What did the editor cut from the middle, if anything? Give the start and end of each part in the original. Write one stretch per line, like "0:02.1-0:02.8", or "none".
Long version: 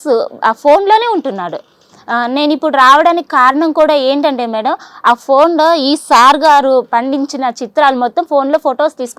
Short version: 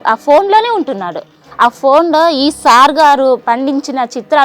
0:01.8-0:04.9